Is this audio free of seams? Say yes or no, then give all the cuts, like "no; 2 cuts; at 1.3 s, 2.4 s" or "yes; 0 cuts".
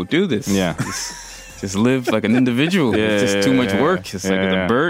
yes; 0 cuts